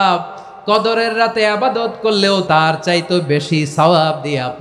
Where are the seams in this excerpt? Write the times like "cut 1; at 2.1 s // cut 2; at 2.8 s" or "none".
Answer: cut 1; at 2.4 s